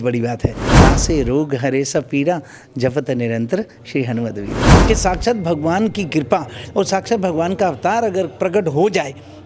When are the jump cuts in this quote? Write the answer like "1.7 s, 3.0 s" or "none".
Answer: 0.8 s, 4.7 s